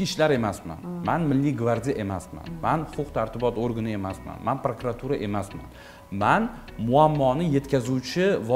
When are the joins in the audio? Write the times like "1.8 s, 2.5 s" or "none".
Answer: none